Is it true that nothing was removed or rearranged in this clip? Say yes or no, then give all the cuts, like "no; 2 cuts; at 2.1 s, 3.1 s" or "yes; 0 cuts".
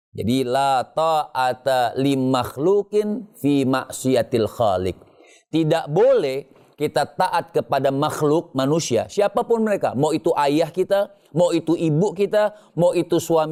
yes; 0 cuts